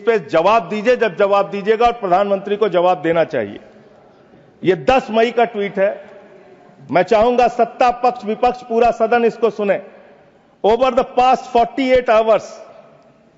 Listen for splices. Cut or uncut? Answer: uncut